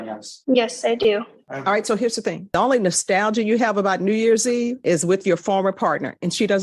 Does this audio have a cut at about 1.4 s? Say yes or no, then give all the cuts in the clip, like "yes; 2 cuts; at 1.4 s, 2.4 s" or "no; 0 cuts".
yes; 2 cuts; at 1.4 s, 2.4 s